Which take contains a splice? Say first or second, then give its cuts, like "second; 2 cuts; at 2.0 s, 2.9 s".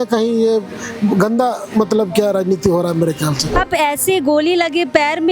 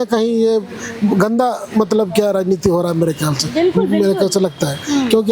first; 1 cut; at 3.5 s